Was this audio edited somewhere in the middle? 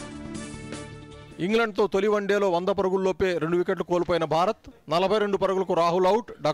no; 0 cuts

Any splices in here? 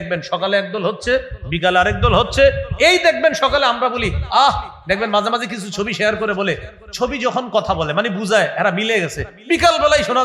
no; 0 cuts

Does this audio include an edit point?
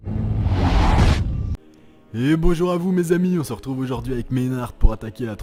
no; 0 cuts

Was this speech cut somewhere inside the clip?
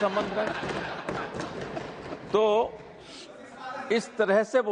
no; 0 cuts

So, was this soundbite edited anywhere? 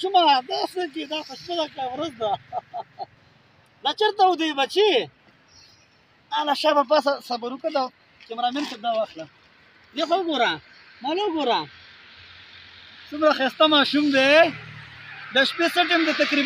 no; 0 cuts

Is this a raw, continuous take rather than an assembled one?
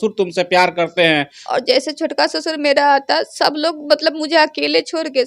no; 1 cut; at 1.4 s

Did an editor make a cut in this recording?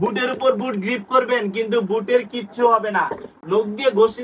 no; 0 cuts

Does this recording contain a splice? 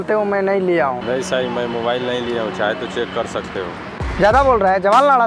yes; 1 cut; at 4.0 s

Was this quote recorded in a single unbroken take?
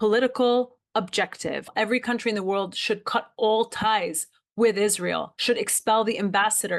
no; 2 cuts; at 1.7 s, 5.3 s

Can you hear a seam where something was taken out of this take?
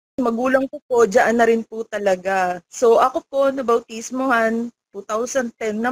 yes; 1 cut; at 2.6 s

